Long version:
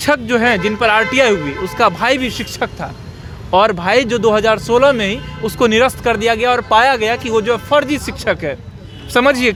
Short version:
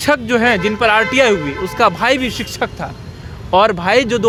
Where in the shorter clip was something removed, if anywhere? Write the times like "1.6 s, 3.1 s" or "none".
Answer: none